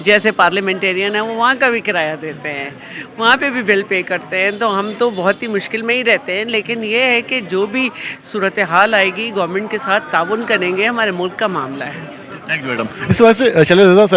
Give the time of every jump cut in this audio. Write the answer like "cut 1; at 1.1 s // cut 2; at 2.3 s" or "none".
none